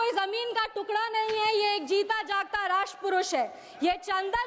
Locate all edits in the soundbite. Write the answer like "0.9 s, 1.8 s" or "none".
none